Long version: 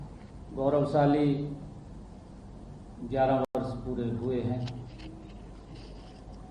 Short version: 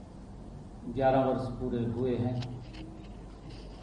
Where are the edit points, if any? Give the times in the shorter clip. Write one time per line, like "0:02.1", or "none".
0:01.3